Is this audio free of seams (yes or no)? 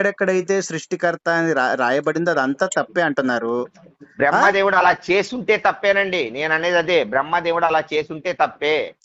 yes